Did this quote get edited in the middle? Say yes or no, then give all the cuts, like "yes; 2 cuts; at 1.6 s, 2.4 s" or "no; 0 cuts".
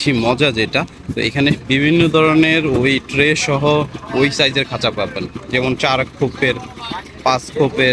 no; 0 cuts